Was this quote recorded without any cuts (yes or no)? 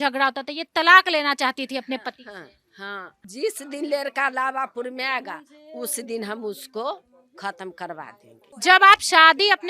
no